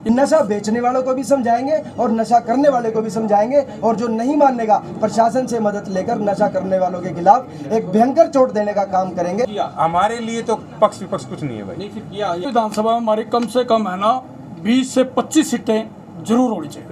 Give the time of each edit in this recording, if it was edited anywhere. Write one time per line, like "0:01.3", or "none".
0:09.5
0:12.4

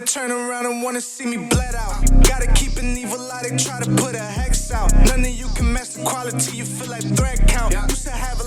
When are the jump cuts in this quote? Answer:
none

